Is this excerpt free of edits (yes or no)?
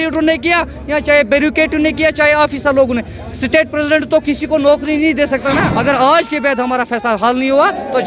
no